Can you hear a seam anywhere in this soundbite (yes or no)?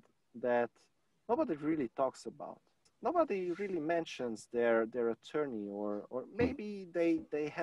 yes